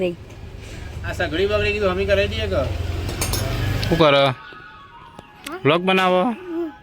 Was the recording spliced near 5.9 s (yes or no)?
no